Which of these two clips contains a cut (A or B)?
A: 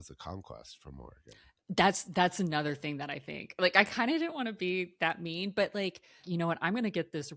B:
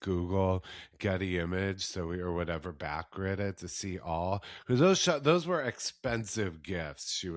A